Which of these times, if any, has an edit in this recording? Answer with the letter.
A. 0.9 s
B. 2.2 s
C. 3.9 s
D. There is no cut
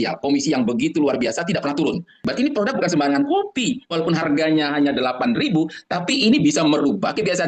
B